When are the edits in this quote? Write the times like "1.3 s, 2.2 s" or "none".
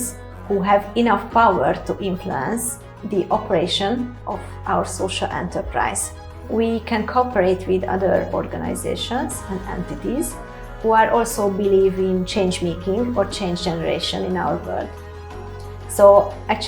6.4 s